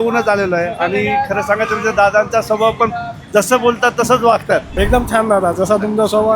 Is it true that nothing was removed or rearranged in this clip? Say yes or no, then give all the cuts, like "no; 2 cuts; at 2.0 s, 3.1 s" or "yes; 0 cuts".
no; 1 cut; at 4.7 s